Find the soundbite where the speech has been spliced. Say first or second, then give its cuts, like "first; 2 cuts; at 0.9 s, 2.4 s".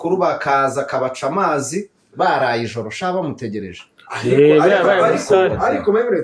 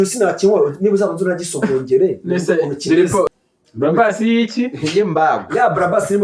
second; 1 cut; at 3.3 s